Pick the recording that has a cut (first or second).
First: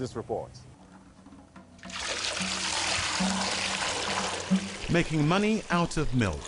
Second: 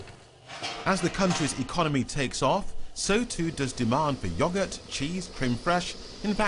first